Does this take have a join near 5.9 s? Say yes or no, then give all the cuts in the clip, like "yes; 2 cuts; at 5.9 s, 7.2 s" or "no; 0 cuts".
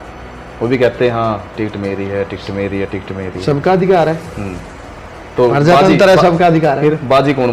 no; 0 cuts